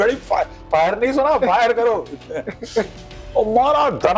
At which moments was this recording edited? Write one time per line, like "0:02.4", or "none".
none